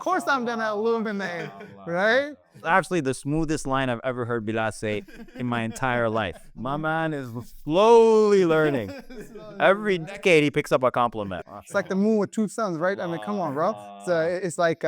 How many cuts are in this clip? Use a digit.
3